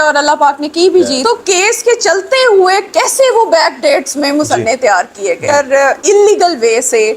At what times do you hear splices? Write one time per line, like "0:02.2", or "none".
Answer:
0:01.2
0:05.4